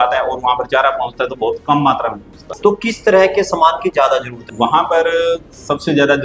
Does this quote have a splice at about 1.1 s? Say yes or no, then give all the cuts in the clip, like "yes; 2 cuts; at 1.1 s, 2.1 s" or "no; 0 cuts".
no; 2 cuts; at 2.4 s, 4.5 s